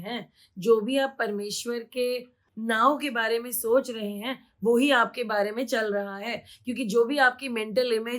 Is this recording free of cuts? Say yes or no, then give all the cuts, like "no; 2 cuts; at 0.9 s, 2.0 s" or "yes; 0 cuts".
no; 1 cut; at 2.4 s